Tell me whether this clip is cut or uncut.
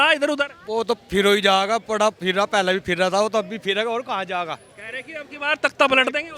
uncut